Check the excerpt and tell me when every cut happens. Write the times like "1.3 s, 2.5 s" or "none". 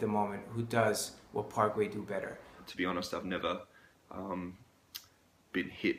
2.6 s